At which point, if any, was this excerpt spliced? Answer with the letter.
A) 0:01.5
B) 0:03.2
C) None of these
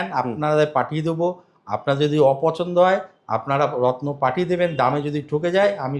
C